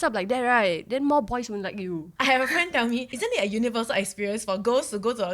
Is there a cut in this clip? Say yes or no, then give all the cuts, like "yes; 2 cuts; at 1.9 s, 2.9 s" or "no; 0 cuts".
yes; 2 cuts; at 2.1 s, 3.1 s